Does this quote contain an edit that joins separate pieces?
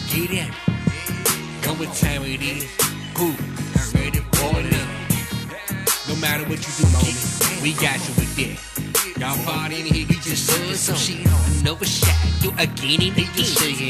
no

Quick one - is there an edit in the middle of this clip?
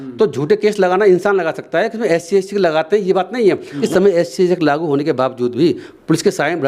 yes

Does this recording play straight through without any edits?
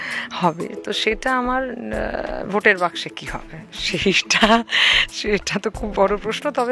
yes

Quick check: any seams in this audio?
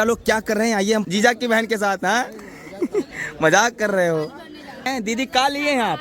yes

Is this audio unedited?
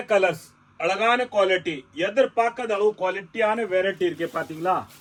yes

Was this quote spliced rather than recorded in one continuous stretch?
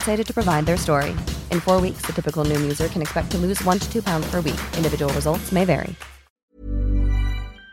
yes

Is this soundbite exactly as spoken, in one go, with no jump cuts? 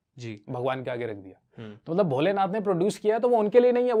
yes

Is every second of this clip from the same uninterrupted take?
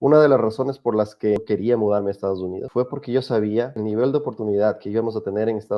no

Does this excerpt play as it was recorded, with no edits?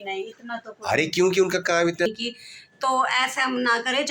no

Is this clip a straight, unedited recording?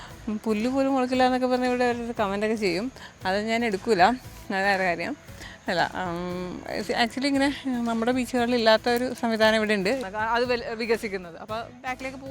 no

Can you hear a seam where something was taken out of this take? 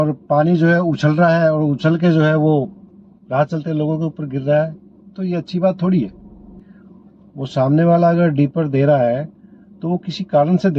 yes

